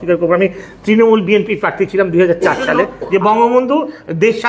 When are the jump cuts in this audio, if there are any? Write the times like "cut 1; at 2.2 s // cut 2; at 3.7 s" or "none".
cut 1; at 2.9 s